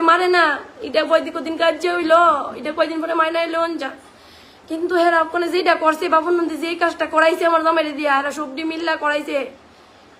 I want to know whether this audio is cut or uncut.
uncut